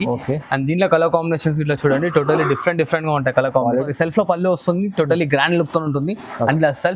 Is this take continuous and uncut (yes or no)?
no